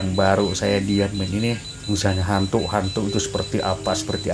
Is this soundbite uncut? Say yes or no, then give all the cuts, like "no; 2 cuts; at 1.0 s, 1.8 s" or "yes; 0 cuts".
no; 1 cut; at 1.7 s